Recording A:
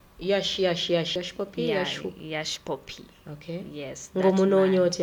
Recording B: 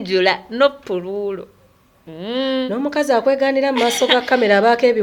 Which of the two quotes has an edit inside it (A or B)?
A